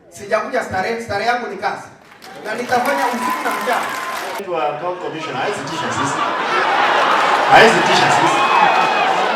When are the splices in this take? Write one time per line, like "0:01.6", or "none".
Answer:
0:04.4